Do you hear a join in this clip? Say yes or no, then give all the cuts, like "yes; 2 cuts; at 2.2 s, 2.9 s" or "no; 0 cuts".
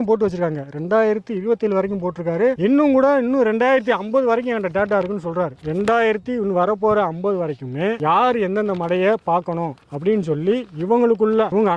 no; 0 cuts